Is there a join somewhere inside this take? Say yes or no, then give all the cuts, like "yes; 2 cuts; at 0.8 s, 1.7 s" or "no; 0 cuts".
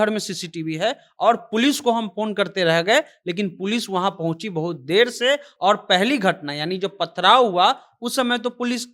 no; 0 cuts